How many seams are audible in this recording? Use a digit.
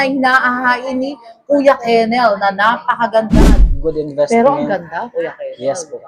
1